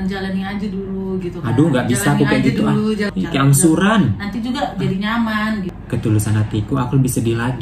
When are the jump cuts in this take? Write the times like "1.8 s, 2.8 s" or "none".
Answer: 3.1 s, 5.8 s

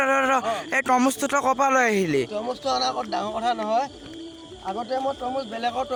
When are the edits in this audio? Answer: none

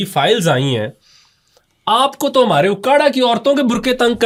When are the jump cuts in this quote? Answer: none

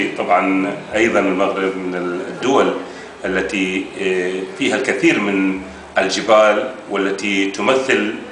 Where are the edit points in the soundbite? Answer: none

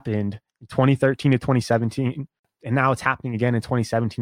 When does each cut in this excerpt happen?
2.5 s

